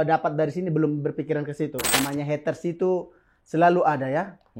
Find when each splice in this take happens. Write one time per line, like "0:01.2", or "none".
0:01.8